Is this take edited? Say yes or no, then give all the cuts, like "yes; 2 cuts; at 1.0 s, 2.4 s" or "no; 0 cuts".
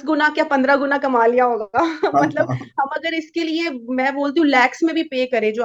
no; 0 cuts